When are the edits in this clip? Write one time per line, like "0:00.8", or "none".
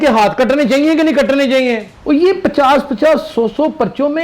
0:01.9